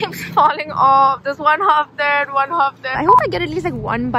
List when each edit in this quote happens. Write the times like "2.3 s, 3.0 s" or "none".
2.9 s